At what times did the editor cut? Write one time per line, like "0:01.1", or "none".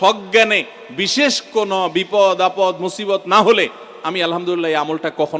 none